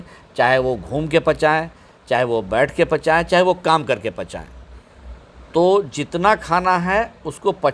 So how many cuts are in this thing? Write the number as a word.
zero